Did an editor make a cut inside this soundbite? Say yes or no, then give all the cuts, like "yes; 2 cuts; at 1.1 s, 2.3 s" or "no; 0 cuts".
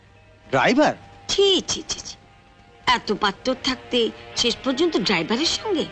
no; 0 cuts